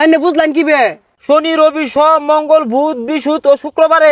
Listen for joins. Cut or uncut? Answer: cut